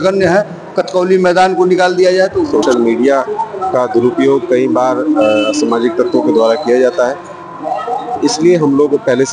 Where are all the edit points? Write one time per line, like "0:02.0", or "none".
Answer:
0:02.6